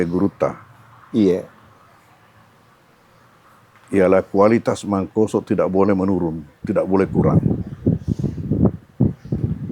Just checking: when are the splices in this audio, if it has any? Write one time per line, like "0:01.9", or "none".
none